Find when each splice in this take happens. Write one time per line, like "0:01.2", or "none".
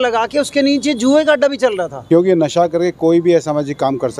0:01.4